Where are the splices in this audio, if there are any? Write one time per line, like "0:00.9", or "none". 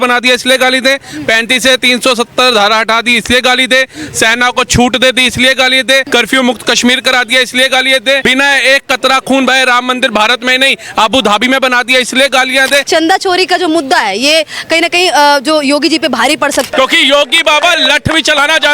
0:06.1
0:08.2
0:12.9
0:16.7

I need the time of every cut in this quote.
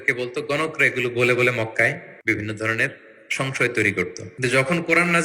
0:02.1
0:04.2

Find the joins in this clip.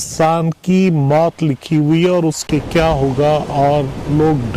0:02.4

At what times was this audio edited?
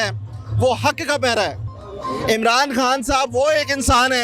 0:01.7

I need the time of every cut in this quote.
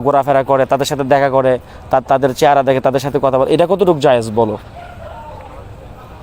none

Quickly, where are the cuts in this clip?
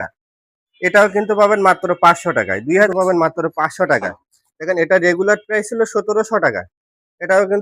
0:02.7

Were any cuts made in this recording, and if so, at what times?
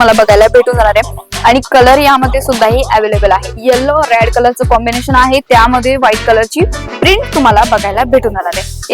0:03.5

